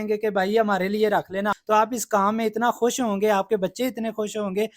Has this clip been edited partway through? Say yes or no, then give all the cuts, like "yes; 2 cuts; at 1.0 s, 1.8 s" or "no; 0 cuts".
yes; 1 cut; at 1.5 s